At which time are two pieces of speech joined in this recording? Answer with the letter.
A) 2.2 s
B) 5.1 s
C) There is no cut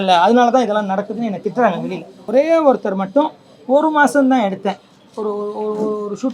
A